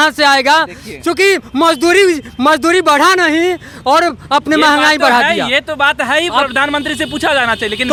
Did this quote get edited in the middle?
no; 0 cuts

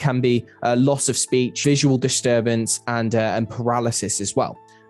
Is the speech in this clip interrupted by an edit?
yes; 1 cut; at 1.6 s

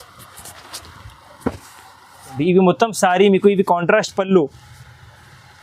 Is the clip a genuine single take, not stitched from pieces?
no; 1 cut; at 2.4 s

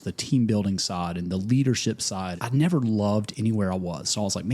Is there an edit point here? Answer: yes; 1 cut; at 2.4 s

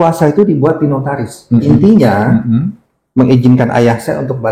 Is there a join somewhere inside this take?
yes; 1 cut; at 1.7 s

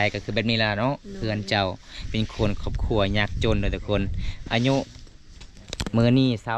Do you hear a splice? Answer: no; 0 cuts

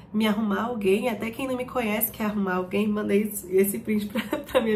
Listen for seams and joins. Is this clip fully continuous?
yes; 0 cuts

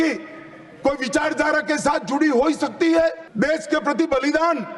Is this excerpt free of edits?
no; 1 cut; at 3.2 s

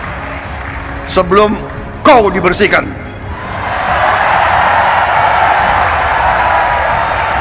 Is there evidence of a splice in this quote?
no; 0 cuts

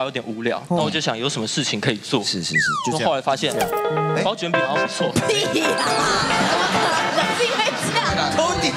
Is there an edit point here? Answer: no; 0 cuts

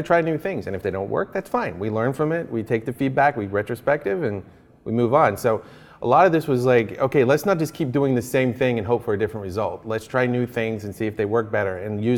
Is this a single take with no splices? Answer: yes; 0 cuts

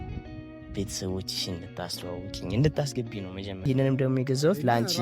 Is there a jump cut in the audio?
yes; 1 cut; at 3.6 s

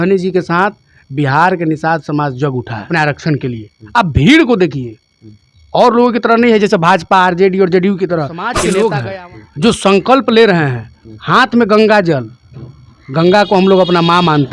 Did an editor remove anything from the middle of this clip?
yes; 2 cuts; at 2.9 s, 8.5 s

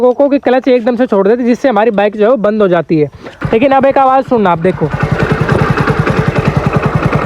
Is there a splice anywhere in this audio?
yes; 1 cut; at 3.3 s

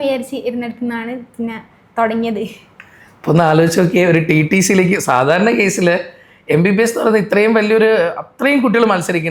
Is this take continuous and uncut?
yes; 0 cuts

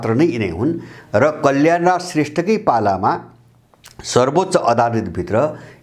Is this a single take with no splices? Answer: yes; 0 cuts

